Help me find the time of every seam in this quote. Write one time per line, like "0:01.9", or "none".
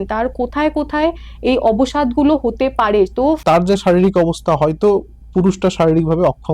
0:03.4